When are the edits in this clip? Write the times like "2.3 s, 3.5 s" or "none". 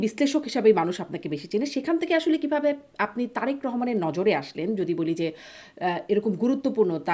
none